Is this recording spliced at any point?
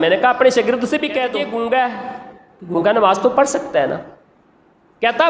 yes; 1 cut; at 1.3 s

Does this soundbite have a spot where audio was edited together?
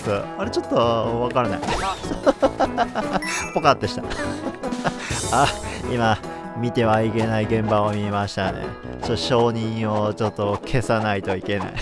no; 0 cuts

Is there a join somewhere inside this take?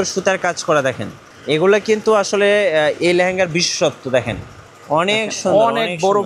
no; 0 cuts

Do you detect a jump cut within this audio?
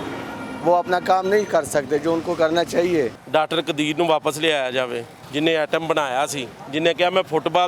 yes; 2 cuts; at 3.2 s, 5.2 s

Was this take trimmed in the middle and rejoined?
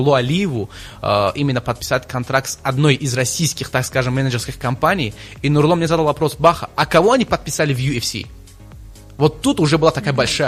no; 0 cuts

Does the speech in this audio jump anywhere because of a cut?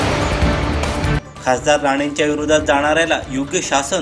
yes; 1 cut; at 1.0 s

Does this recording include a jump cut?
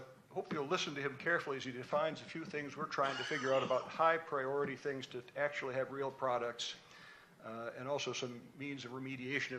yes; 1 cut; at 7.0 s

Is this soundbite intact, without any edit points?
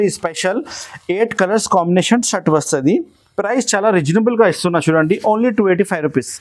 yes; 0 cuts

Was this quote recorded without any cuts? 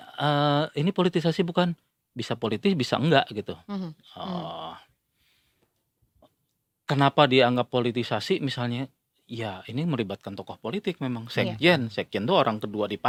yes; 0 cuts

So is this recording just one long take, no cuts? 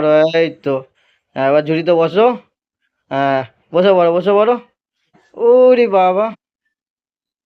yes; 0 cuts

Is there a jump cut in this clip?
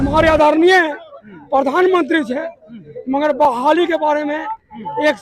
no; 0 cuts

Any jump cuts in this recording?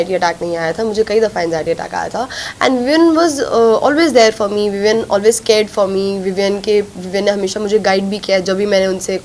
no; 0 cuts

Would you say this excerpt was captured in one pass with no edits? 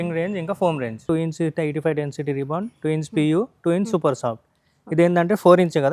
no; 1 cut; at 1.0 s

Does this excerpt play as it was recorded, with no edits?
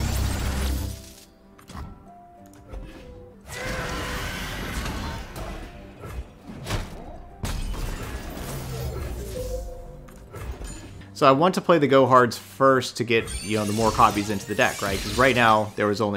no; 2 cuts; at 3.4 s, 11.0 s

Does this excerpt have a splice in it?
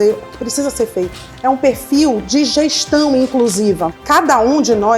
yes; 2 cuts; at 1.3 s, 3.9 s

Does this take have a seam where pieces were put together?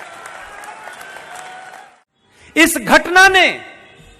yes; 1 cut; at 1.9 s

